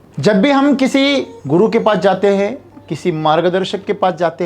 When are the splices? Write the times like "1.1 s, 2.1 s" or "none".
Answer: 1.3 s